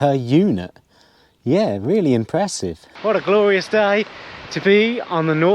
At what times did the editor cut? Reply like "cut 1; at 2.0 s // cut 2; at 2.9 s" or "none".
cut 1; at 2.9 s